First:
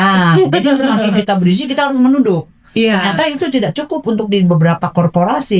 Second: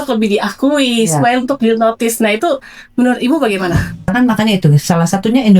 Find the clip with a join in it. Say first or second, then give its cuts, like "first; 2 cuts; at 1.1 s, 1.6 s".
second; 1 cut; at 4.1 s